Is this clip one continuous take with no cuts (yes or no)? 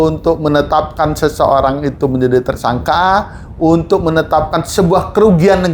yes